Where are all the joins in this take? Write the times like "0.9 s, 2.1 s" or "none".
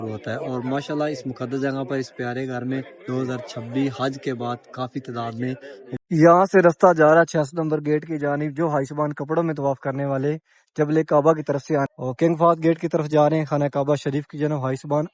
6.0 s, 11.9 s